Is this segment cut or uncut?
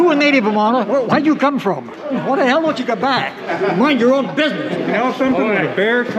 cut